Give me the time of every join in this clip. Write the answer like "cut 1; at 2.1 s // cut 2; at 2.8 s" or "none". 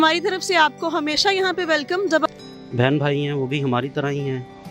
cut 1; at 2.3 s